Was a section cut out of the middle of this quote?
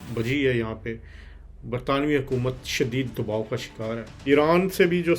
yes; 1 cut; at 4.1 s

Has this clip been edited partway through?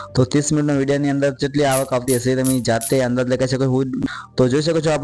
no; 0 cuts

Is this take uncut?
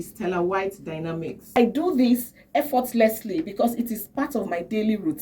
no; 1 cut; at 1.5 s

